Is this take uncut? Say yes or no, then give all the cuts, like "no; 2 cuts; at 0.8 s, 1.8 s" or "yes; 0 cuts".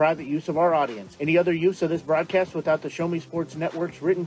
yes; 0 cuts